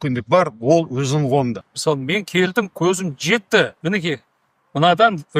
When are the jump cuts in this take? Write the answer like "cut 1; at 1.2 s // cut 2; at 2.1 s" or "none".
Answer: cut 1; at 1.6 s // cut 2; at 3.8 s